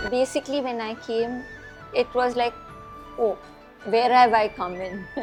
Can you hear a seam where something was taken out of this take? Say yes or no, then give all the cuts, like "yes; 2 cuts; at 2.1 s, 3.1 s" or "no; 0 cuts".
no; 0 cuts